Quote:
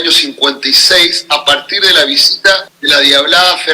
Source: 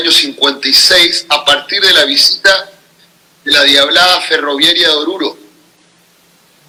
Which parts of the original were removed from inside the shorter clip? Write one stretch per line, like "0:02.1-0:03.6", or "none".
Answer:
0:02.7-0:03.4